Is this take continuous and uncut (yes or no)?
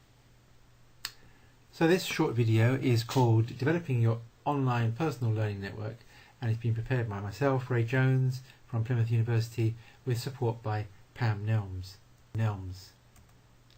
yes